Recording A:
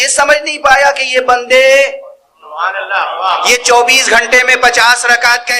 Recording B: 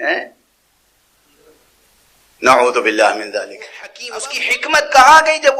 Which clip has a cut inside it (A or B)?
B